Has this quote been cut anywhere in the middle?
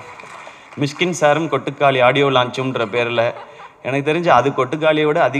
no; 0 cuts

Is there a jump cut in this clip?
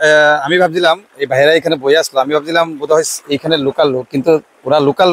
no; 0 cuts

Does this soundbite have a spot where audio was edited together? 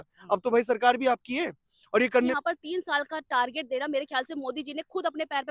yes; 1 cut; at 2.3 s

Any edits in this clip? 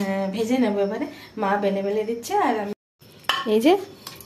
yes; 1 cut; at 2.7 s

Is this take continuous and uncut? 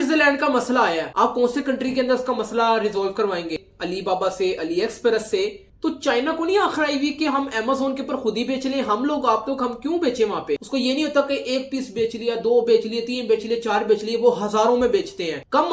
no; 2 cuts; at 3.6 s, 10.6 s

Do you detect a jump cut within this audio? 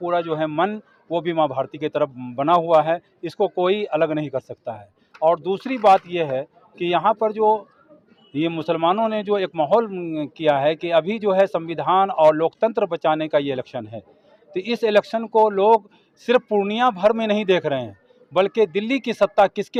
no; 0 cuts

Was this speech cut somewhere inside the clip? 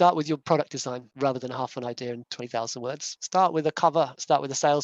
yes; 2 cuts; at 1.0 s, 3.1 s

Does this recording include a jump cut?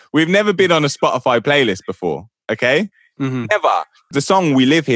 yes; 1 cut; at 4.0 s

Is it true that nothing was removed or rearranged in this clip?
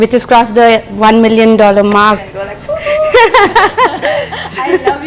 no; 1 cut; at 2.2 s

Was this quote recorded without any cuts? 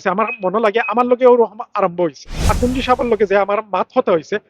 no; 1 cut; at 2.5 s

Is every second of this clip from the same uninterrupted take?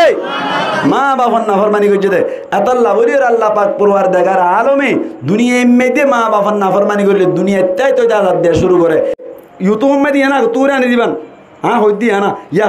no; 1 cut; at 9.2 s

